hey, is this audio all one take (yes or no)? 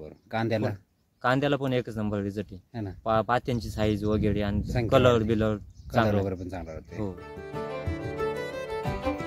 no